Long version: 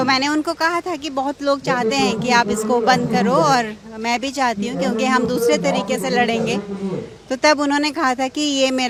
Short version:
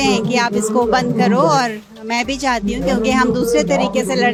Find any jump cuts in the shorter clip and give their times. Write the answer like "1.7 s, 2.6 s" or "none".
none